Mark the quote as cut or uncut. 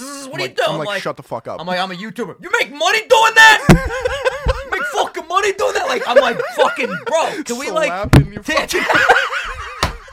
uncut